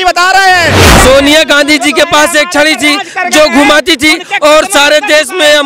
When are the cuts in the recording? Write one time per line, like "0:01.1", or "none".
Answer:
0:00.9